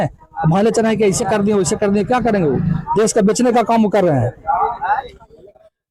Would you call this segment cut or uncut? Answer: uncut